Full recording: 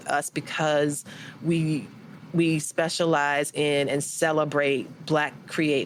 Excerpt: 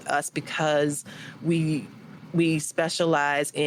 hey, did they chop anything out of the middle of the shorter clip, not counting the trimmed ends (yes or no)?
no